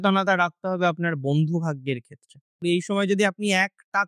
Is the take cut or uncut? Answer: cut